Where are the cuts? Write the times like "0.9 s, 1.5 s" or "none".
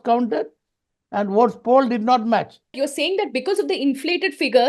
2.8 s